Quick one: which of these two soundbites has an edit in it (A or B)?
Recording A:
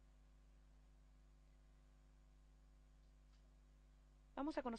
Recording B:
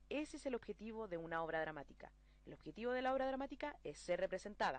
A